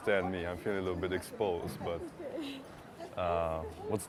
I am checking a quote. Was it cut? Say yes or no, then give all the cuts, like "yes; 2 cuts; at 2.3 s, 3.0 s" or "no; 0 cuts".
no; 0 cuts